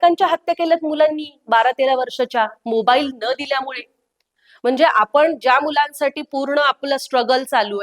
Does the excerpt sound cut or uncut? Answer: uncut